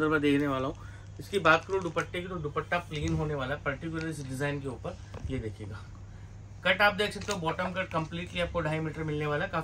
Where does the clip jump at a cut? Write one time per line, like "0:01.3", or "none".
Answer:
none